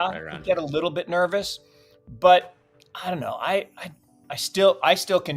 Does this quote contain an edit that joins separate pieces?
no; 0 cuts

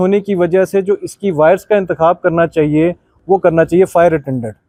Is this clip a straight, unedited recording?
yes; 0 cuts

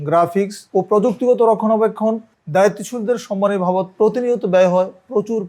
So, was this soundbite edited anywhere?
no; 0 cuts

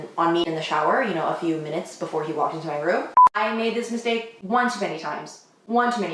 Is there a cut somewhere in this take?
yes; 1 cut; at 3.1 s

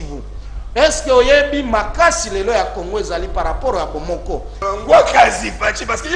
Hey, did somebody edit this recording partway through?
yes; 1 cut; at 4.5 s

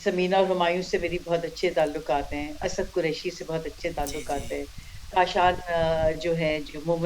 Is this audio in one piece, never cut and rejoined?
yes; 0 cuts

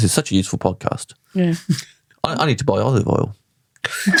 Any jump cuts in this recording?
no; 0 cuts

